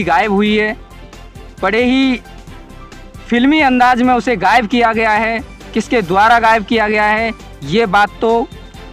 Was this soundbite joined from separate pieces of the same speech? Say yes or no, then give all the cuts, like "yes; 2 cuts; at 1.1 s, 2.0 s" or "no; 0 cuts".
no; 0 cuts